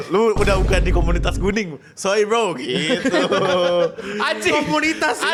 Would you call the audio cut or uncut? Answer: uncut